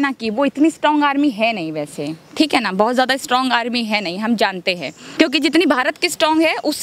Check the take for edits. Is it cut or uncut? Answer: cut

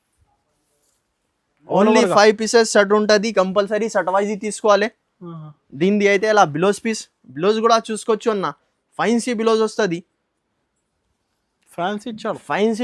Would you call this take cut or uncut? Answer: uncut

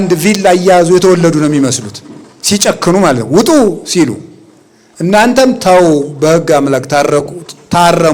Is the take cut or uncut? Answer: uncut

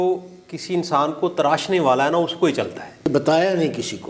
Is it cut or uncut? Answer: cut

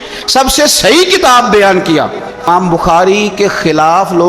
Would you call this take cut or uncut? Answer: cut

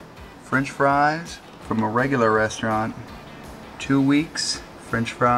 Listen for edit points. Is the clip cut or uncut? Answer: uncut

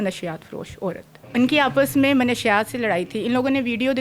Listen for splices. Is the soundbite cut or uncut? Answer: cut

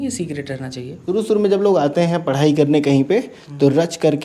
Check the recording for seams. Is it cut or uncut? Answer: cut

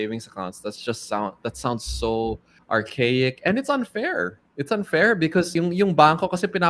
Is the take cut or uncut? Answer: cut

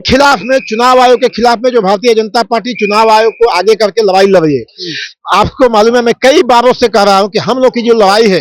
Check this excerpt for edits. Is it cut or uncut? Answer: uncut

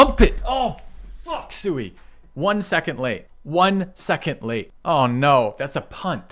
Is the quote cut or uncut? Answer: cut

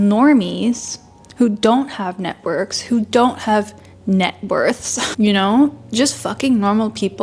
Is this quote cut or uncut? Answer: uncut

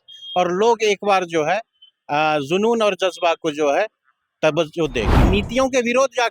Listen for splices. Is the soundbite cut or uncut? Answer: cut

